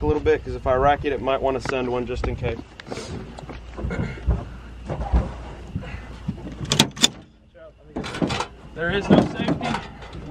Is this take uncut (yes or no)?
yes